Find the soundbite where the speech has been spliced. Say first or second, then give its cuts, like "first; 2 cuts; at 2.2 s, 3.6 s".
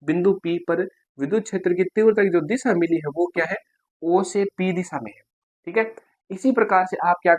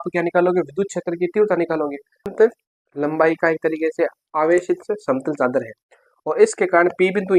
second; 1 cut; at 2.3 s